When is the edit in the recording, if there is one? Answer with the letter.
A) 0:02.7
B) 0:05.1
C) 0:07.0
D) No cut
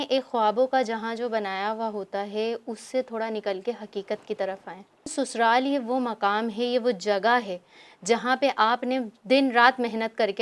B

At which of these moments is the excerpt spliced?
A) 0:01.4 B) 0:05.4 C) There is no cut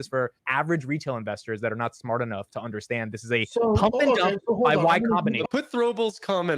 B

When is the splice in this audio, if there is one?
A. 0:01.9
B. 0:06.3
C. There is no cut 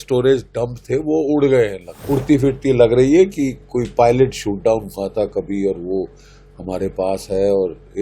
A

